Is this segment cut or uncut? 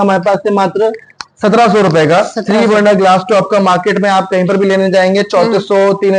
uncut